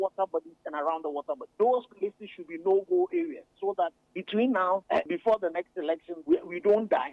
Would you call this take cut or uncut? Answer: cut